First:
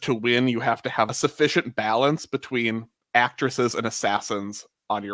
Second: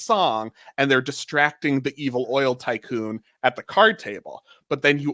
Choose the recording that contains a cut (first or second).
first